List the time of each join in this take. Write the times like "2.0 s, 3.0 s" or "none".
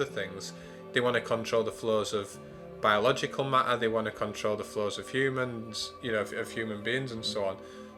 none